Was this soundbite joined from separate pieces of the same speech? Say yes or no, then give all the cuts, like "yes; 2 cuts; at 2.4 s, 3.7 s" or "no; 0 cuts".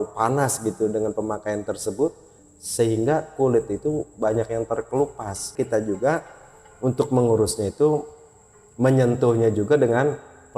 yes; 1 cut; at 5.5 s